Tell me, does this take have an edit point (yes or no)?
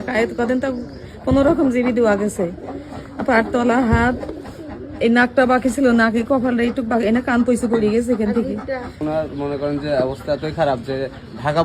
yes